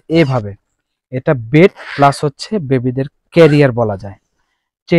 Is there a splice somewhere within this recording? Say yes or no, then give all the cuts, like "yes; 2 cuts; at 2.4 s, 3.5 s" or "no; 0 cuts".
no; 0 cuts